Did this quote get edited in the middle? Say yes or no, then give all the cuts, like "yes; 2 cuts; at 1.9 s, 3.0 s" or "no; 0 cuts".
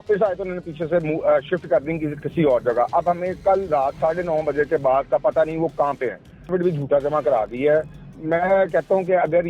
yes; 1 cut; at 6.5 s